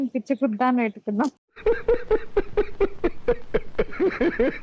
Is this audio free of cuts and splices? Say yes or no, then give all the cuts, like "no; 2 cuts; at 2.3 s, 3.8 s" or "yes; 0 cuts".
yes; 0 cuts